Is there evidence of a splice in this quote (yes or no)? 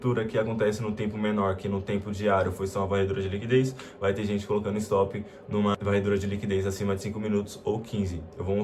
yes